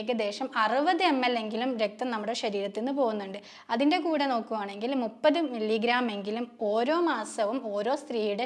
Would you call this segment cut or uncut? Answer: uncut